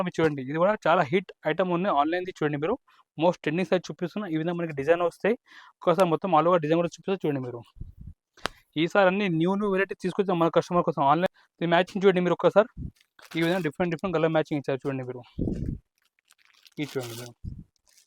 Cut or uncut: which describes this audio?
cut